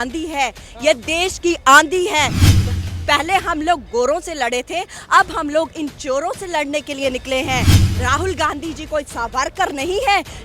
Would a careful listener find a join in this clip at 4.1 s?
no; 0 cuts

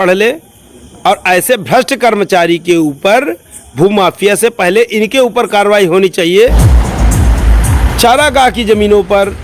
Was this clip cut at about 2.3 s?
no; 1 cut; at 6.7 s

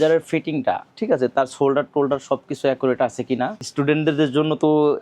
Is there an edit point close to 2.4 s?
no; 1 cut; at 3.6 s

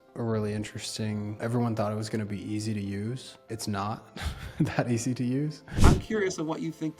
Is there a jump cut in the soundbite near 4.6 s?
no; 3 cuts; at 1.3 s, 3.3 s, 6.1 s

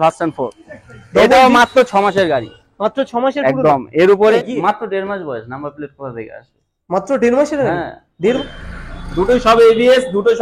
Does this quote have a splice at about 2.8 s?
no; 2 cuts; at 4.4 s, 8.4 s

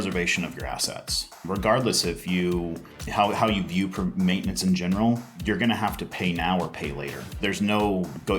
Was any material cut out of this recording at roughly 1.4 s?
yes; 2 cuts; at 1.4 s, 7.3 s

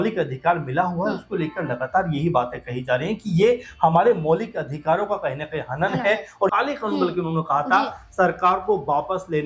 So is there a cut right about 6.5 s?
yes; 1 cut; at 6.5 s

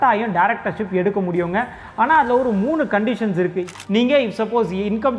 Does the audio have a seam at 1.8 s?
no; 1 cut; at 3.7 s

